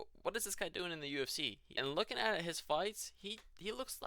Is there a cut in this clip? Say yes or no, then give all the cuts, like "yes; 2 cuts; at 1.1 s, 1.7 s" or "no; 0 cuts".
yes; 1 cut; at 1.6 s